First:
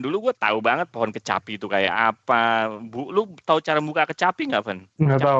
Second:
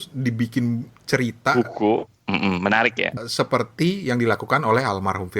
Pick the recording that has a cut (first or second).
second